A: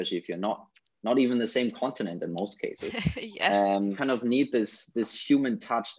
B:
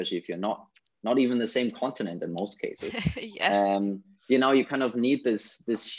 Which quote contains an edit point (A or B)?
A